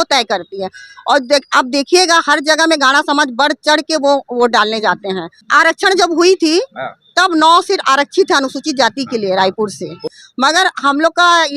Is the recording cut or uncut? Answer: cut